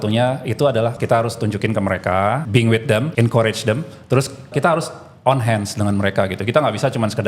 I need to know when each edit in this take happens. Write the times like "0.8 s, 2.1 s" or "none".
1.0 s, 2.8 s, 4.5 s